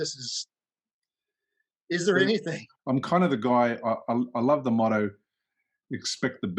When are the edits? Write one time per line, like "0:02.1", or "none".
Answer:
0:02.6